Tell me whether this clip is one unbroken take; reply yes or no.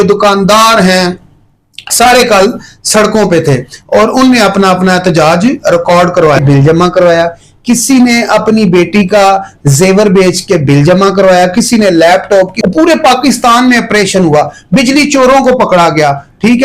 no